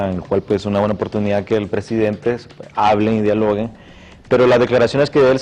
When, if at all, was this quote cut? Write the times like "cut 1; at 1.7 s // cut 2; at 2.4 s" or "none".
cut 1; at 1.1 s

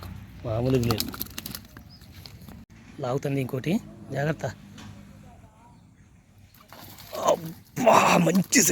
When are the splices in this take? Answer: cut 1; at 2.7 s

